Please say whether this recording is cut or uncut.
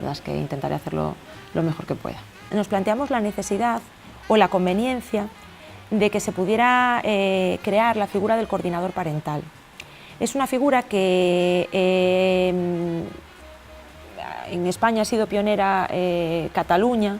cut